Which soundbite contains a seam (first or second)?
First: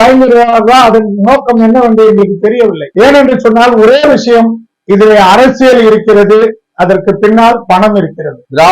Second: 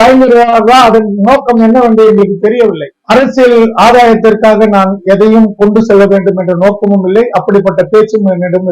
second